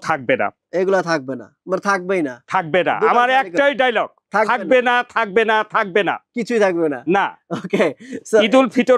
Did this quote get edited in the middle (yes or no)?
no